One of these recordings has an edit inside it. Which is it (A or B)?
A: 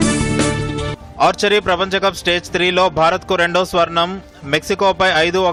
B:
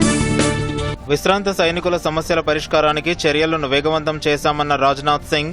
B